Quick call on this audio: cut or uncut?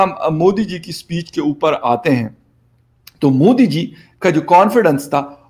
uncut